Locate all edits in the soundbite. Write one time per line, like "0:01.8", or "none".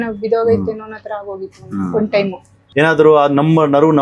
0:02.6